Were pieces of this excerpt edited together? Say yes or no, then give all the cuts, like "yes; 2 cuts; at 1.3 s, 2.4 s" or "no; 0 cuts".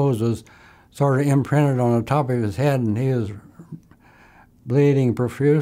no; 0 cuts